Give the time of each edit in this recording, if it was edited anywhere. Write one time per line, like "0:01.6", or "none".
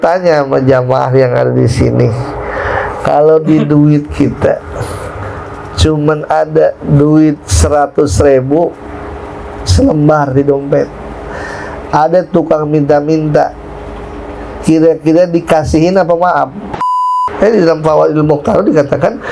0:17.0